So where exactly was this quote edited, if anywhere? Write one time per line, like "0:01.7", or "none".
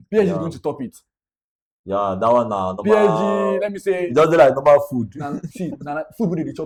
none